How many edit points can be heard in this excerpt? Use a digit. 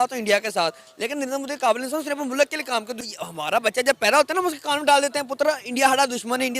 1